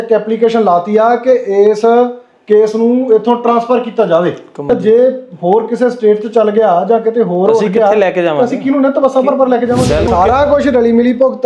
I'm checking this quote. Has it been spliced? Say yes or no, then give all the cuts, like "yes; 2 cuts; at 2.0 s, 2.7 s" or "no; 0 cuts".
yes; 2 cuts; at 4.7 s, 10.1 s